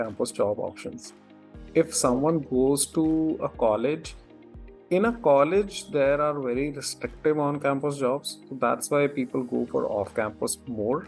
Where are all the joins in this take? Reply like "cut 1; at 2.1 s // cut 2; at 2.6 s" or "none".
none